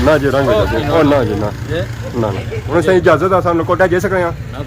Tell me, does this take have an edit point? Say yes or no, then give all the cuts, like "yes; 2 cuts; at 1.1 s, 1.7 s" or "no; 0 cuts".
yes; 1 cut; at 2.6 s